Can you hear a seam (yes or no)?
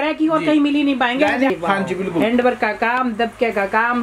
yes